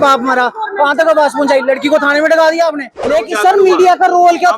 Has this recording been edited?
yes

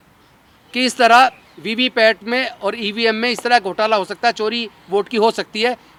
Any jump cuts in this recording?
no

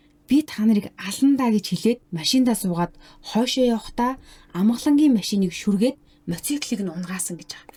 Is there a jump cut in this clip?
no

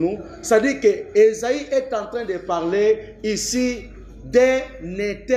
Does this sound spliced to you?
no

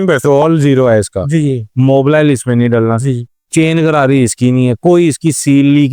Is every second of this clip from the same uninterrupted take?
yes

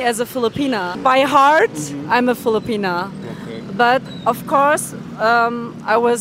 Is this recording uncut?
no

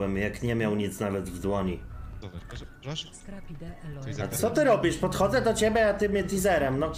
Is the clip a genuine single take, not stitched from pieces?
no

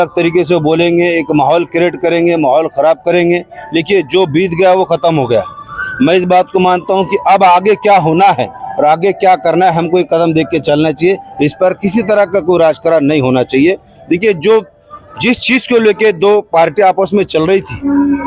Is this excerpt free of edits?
yes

